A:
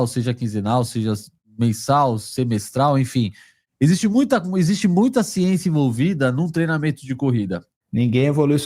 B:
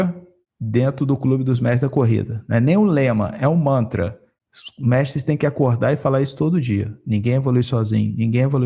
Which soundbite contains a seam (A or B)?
A